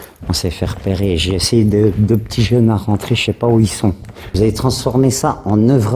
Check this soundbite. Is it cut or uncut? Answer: cut